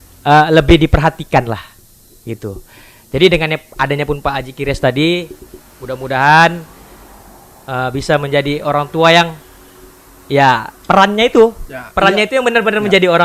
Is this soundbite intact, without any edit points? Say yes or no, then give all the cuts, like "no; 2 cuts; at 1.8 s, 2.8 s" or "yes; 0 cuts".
yes; 0 cuts